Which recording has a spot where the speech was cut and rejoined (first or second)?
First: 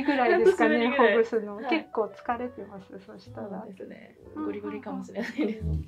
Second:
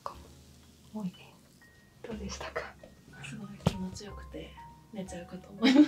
second